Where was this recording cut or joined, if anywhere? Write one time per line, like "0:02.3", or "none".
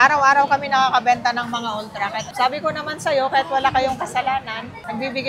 0:02.3